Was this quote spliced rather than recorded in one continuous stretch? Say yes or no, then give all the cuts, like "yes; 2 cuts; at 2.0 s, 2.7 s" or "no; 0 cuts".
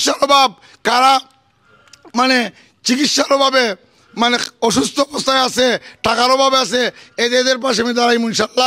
no; 0 cuts